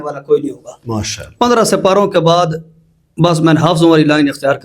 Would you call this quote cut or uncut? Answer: cut